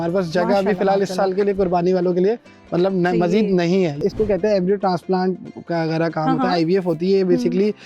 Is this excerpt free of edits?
no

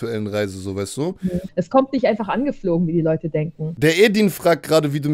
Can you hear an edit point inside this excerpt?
yes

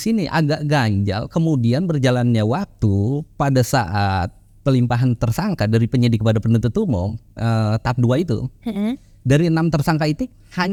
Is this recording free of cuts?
yes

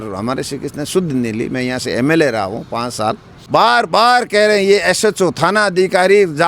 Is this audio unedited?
no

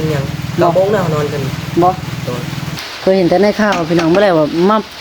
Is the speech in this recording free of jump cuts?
no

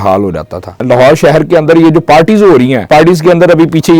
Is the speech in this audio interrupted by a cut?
yes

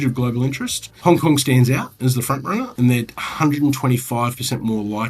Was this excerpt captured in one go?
no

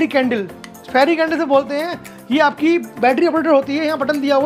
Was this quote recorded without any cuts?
yes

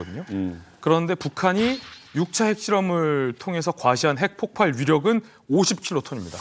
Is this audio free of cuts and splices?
yes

